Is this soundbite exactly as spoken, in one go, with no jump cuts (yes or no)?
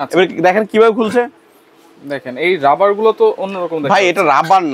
yes